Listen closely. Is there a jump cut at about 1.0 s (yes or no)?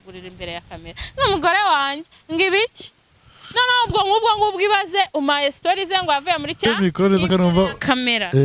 no